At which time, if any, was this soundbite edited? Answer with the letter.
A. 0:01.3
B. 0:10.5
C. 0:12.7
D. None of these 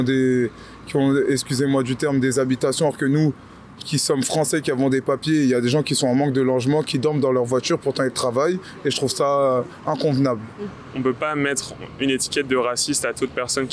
B